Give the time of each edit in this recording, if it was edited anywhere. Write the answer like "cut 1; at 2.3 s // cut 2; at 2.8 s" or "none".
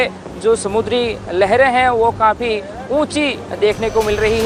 none

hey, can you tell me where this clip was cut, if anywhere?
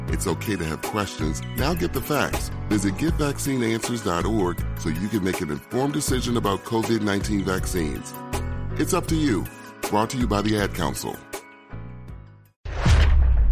cut 1; at 12.6 s

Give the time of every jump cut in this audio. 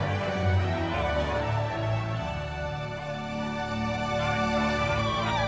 cut 1; at 3.0 s

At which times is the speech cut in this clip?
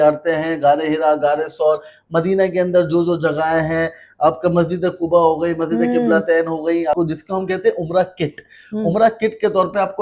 cut 1; at 6.9 s

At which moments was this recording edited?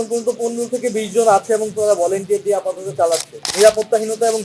cut 1; at 3.4 s

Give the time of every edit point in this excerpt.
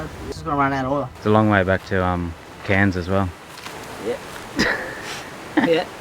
cut 1; at 1.1 s

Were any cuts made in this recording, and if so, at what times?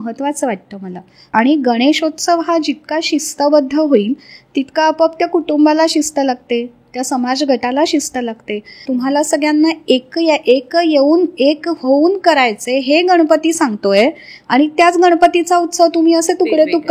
cut 1; at 1.3 s // cut 2; at 8.7 s

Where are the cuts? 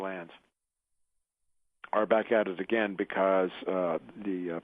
cut 1; at 2.6 s

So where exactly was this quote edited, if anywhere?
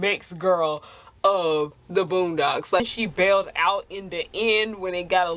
cut 1; at 2.8 s

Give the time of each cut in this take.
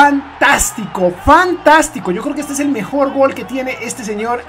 none

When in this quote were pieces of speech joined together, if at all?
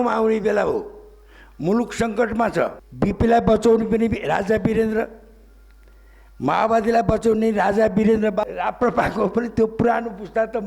cut 1; at 2.8 s // cut 2; at 8.4 s

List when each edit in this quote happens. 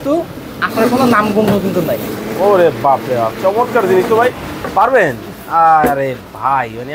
none

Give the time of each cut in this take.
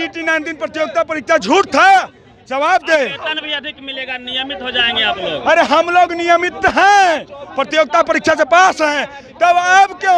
none

